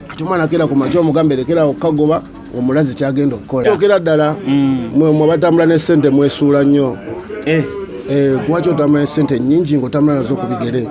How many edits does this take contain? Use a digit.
1